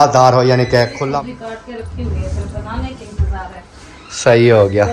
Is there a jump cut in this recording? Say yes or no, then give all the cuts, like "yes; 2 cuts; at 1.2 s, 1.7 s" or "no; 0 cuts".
yes; 1 cut; at 1.0 s